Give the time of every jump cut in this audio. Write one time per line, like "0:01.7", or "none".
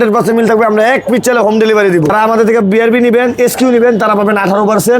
0:02.1